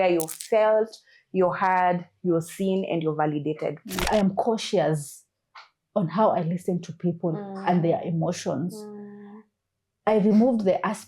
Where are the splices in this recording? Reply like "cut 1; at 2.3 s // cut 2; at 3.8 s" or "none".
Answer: cut 1; at 4.1 s